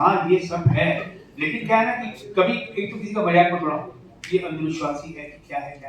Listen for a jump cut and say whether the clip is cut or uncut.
uncut